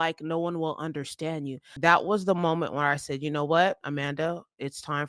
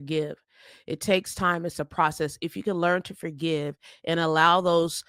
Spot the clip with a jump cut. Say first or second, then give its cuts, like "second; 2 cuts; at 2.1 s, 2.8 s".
first; 1 cut; at 1.6 s